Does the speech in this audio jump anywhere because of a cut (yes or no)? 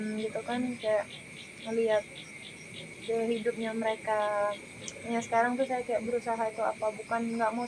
no